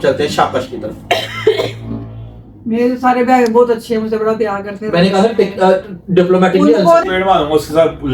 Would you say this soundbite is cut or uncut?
cut